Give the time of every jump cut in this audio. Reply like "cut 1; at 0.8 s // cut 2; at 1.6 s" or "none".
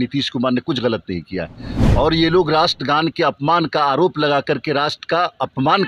none